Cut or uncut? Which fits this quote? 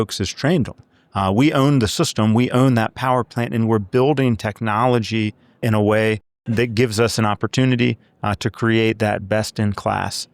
cut